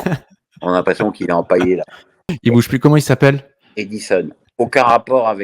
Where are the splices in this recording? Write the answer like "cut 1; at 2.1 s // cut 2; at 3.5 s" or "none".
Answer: cut 1; at 2.3 s // cut 2; at 4.4 s